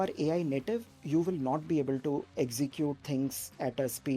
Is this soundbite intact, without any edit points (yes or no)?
yes